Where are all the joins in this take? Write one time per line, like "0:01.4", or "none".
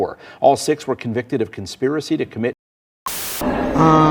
0:03.1